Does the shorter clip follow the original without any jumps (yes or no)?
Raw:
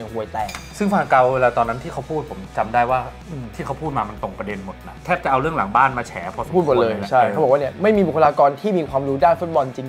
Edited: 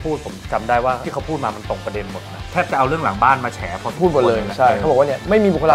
no